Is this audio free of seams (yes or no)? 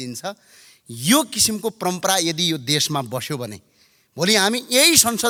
yes